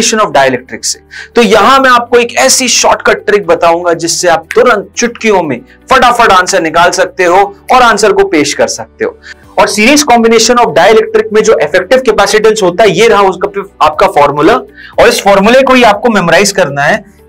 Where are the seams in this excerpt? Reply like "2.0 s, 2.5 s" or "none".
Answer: 9.3 s

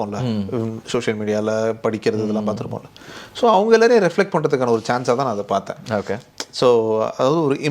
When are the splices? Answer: none

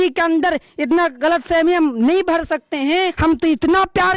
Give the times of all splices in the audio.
3.1 s

